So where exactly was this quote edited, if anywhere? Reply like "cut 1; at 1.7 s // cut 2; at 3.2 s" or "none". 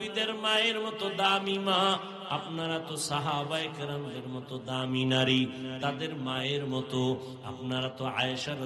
none